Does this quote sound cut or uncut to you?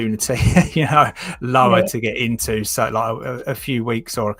uncut